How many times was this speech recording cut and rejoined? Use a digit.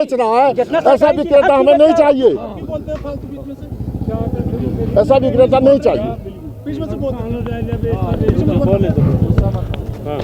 0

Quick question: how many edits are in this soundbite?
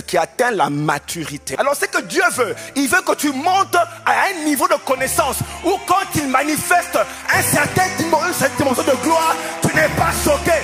1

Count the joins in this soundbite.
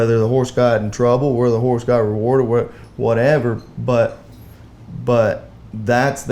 0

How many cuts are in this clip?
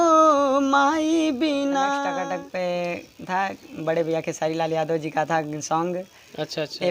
1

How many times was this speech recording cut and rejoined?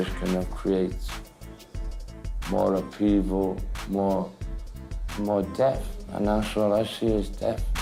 0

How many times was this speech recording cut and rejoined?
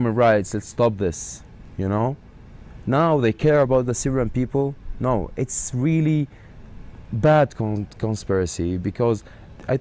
0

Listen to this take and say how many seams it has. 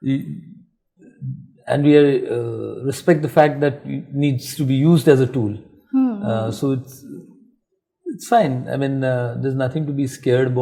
0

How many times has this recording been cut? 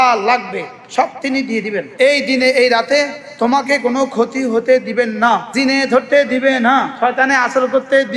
3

